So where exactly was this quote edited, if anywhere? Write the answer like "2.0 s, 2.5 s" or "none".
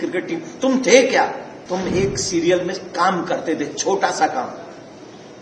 1.5 s